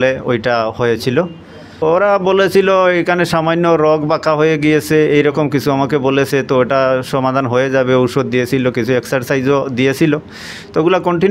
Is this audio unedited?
no; 1 cut; at 1.7 s

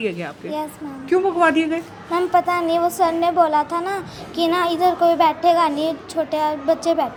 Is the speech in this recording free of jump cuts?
yes; 0 cuts

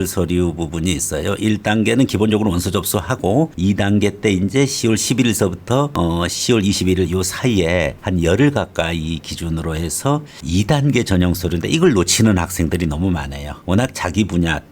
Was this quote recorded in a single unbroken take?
yes; 0 cuts

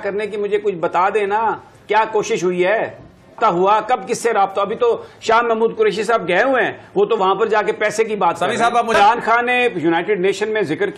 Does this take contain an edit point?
no; 0 cuts

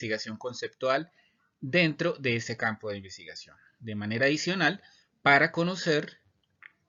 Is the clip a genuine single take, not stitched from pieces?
yes; 0 cuts

